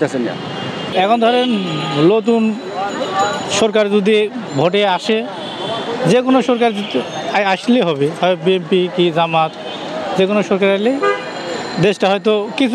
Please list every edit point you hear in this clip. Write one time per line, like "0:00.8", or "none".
none